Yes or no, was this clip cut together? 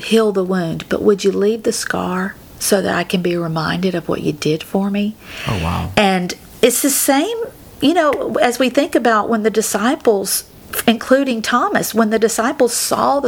no